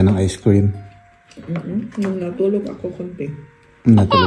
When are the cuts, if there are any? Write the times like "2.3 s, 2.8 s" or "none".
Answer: none